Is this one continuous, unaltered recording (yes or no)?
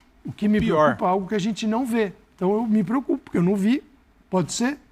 yes